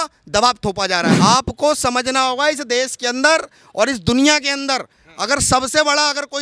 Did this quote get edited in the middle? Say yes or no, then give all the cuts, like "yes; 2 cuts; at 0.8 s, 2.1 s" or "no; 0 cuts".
yes; 1 cut; at 1.1 s